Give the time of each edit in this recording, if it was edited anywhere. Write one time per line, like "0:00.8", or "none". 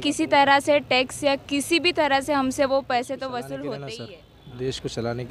0:04.0